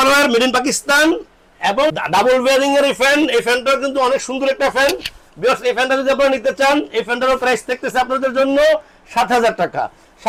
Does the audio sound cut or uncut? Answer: uncut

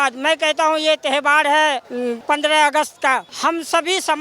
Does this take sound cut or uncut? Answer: cut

